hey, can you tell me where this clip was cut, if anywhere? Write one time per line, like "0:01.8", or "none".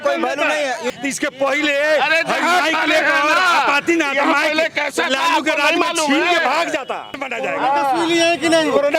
0:00.8
0:07.2